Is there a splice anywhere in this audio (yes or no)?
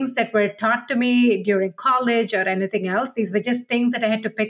no